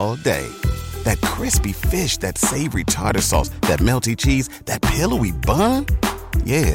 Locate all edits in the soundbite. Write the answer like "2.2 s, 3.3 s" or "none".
none